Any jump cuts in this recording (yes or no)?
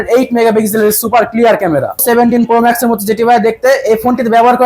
yes